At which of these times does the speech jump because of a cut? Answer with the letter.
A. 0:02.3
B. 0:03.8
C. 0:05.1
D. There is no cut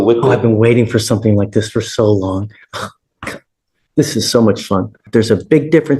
C